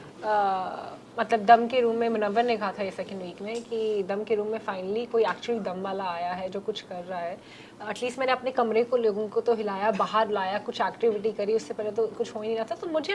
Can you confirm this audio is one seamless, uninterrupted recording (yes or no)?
yes